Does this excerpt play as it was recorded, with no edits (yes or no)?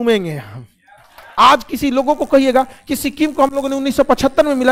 no